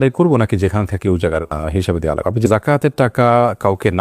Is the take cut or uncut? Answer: cut